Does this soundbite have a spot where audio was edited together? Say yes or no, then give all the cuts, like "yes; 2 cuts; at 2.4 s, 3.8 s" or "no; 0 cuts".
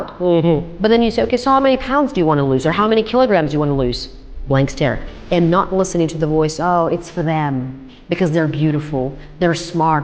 yes; 1 cut; at 5.1 s